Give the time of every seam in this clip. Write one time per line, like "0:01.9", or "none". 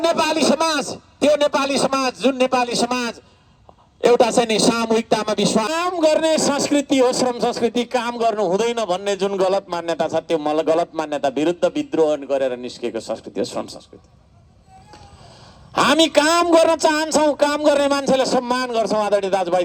0:05.7